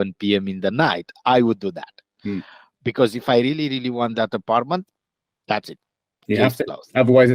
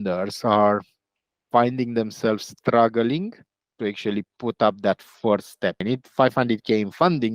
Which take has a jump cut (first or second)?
second